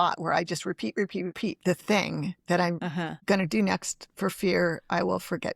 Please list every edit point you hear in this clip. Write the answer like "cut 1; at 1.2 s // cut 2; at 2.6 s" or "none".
cut 1; at 1.3 s // cut 2; at 3.0 s